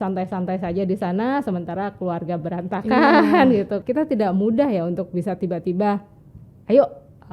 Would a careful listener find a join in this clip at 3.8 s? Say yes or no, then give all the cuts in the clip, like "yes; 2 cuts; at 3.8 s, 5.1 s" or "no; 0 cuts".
yes; 1 cut; at 3.8 s